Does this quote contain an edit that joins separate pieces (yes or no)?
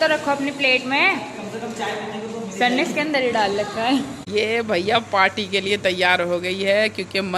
yes